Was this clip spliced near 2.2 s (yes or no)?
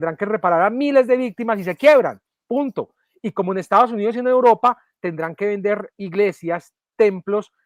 no